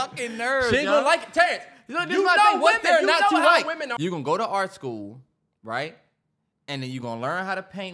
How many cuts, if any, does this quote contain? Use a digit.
1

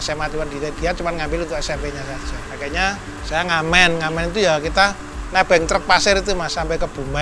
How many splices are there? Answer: 1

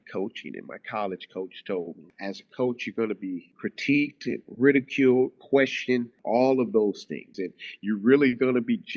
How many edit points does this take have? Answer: 4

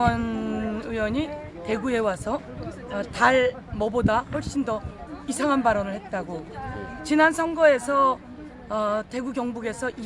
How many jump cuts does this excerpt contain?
0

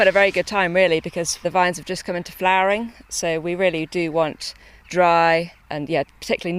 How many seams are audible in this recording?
0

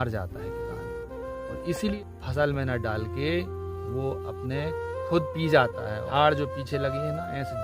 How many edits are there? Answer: 2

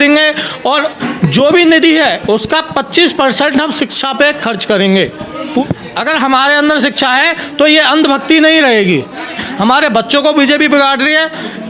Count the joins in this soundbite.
2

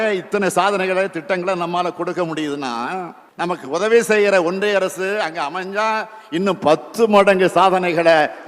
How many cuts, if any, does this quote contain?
1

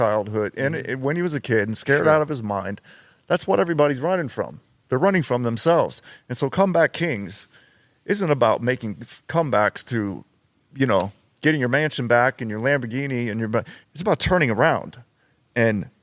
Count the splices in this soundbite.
1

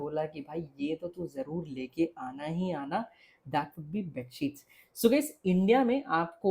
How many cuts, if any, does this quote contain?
0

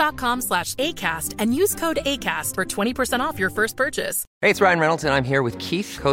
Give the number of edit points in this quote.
1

